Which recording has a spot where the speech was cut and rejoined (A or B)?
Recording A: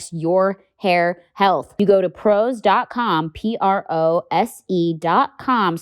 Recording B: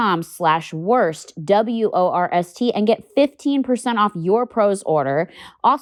A